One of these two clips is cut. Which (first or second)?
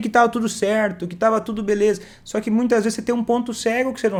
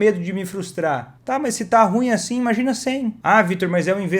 second